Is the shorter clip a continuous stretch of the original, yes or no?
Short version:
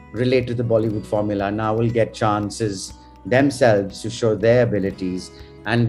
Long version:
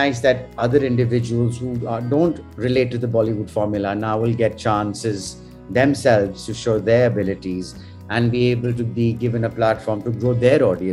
yes